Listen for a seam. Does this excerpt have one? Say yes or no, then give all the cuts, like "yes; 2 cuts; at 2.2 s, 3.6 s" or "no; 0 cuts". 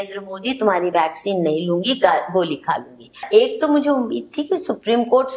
yes; 1 cut; at 3.2 s